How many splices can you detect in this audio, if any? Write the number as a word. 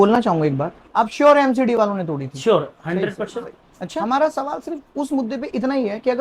one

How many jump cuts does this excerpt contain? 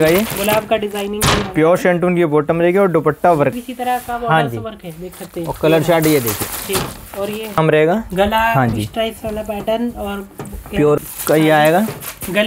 three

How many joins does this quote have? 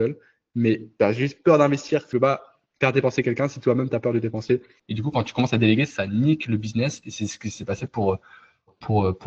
three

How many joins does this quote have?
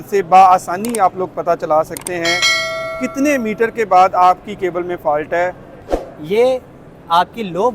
one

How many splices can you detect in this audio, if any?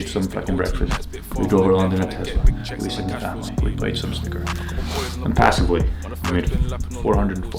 zero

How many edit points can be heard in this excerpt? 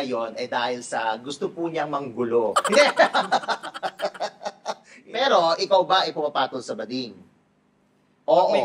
one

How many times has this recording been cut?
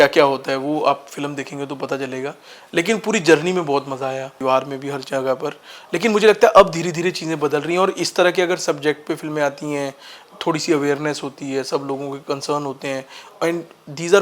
one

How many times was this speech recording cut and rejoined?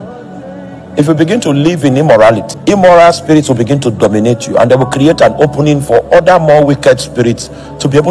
one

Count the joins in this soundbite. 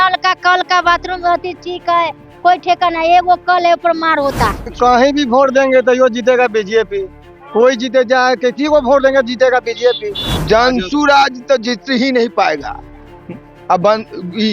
two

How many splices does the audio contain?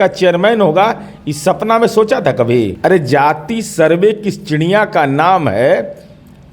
one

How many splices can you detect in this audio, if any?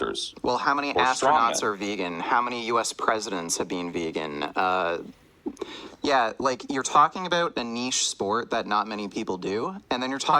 one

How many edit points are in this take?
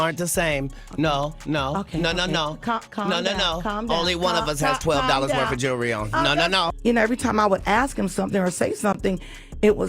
one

